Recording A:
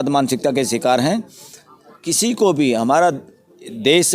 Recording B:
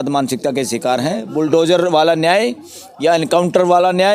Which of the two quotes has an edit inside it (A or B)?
B